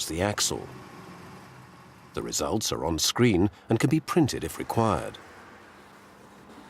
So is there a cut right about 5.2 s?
yes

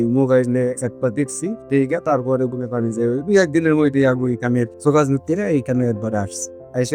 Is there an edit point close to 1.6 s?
no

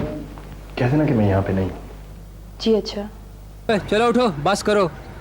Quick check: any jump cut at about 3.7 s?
yes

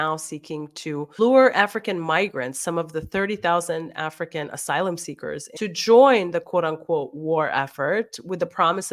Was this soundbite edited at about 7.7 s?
no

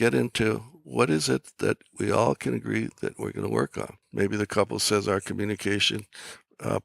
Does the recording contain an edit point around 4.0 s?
yes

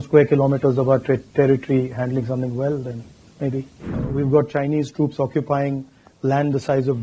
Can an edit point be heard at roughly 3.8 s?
yes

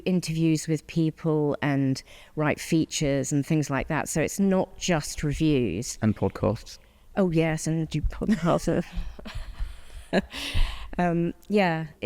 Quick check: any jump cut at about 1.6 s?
no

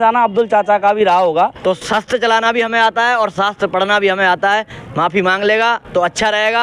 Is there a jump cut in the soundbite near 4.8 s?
no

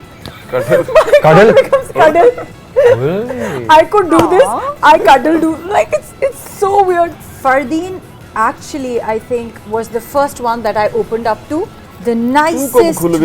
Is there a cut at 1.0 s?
no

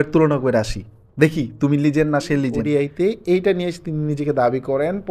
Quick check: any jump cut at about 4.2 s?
no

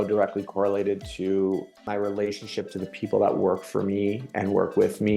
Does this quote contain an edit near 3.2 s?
no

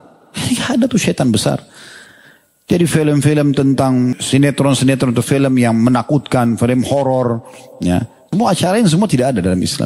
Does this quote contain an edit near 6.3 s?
no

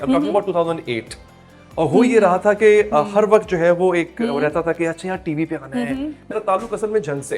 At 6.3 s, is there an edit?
yes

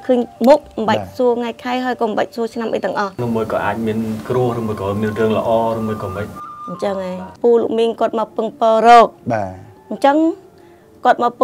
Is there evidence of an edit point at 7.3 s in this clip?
yes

